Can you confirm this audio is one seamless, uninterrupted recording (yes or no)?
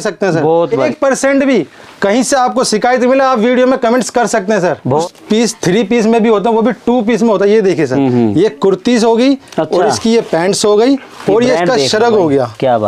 no